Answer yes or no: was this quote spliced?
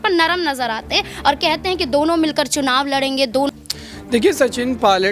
yes